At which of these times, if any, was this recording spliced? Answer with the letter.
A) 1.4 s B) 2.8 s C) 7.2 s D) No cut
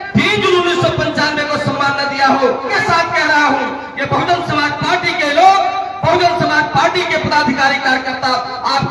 B